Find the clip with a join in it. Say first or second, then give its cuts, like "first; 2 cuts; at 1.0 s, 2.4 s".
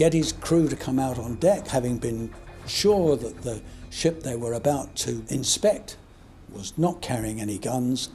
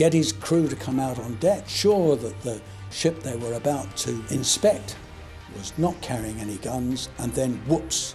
second; 1 cut; at 1.6 s